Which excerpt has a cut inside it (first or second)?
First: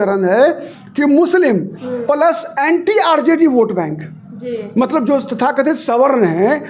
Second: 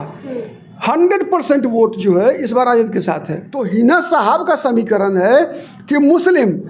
second